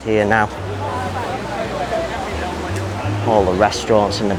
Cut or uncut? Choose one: uncut